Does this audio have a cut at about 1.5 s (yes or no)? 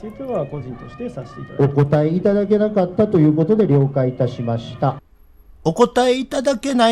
no